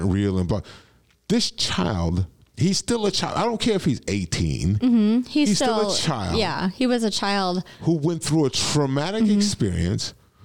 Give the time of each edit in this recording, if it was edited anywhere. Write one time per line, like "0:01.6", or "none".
0:02.4